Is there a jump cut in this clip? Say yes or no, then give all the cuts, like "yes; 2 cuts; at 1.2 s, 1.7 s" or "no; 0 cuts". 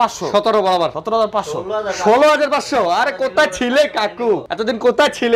yes; 2 cuts; at 1.0 s, 4.5 s